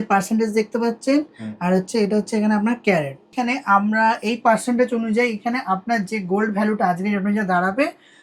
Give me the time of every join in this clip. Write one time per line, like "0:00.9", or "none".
0:03.3